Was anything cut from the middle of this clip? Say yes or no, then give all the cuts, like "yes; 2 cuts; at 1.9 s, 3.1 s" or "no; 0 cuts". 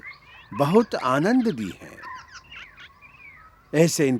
no; 0 cuts